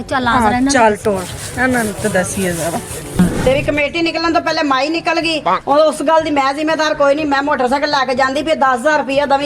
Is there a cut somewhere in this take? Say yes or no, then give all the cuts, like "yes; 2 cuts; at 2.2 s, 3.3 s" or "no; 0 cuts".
yes; 1 cut; at 3.0 s